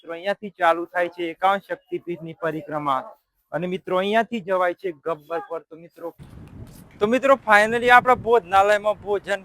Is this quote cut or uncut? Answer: cut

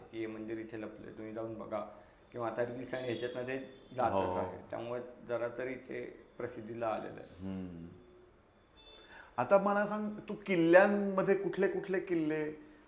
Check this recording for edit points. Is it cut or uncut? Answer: uncut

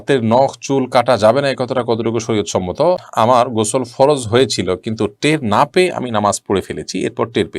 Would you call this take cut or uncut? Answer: cut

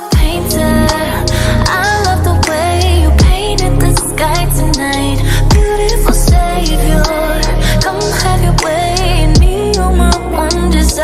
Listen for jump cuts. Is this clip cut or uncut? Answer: uncut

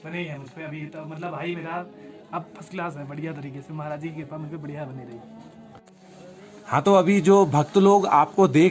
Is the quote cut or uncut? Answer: uncut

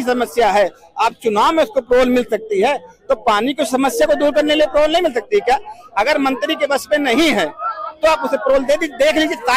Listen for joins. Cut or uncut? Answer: uncut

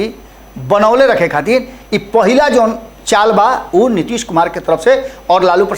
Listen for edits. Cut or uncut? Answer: uncut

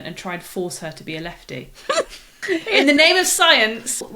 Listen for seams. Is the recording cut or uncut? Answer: cut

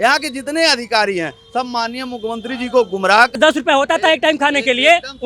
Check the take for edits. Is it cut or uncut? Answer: cut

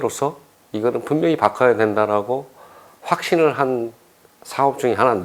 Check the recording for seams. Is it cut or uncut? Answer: uncut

